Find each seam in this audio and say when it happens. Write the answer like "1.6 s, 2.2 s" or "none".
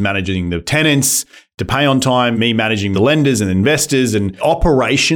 2.8 s, 4.3 s